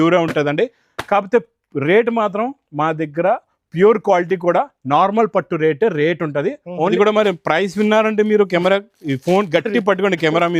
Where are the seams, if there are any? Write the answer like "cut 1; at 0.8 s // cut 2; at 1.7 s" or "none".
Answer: cut 1; at 6.9 s